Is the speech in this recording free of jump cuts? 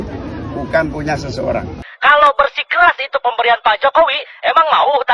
no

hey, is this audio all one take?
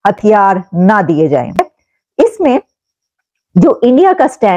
no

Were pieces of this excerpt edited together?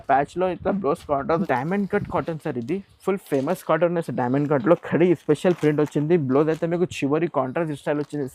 yes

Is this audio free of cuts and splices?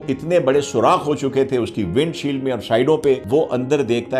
no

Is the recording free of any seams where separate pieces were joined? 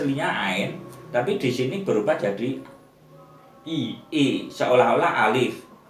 yes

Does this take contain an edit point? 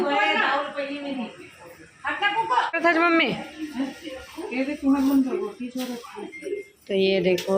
yes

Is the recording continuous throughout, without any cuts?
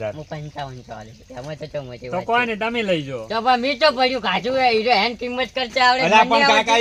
yes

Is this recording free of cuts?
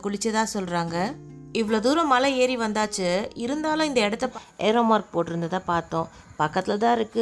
no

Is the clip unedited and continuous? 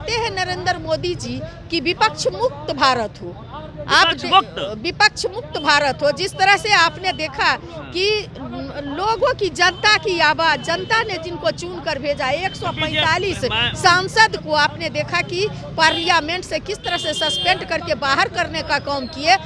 yes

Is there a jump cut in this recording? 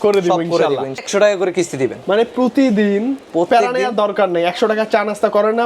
yes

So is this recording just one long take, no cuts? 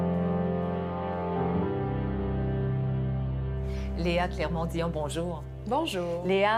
yes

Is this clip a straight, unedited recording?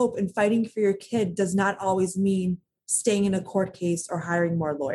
yes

